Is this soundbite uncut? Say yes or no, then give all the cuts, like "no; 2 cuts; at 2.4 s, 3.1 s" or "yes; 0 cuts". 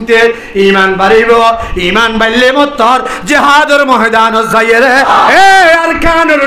no; 1 cut; at 5.1 s